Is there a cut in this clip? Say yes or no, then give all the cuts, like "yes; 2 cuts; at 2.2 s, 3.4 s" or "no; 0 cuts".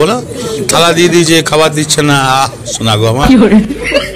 yes; 1 cut; at 3.2 s